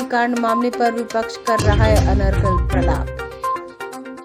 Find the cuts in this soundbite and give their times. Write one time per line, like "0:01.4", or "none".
none